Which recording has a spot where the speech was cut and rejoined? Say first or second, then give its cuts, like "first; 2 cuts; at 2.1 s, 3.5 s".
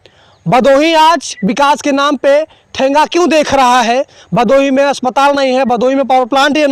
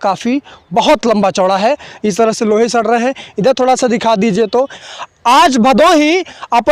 second; 1 cut; at 4.8 s